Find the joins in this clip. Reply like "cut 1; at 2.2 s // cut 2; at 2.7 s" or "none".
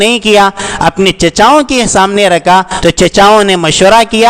cut 1; at 2.7 s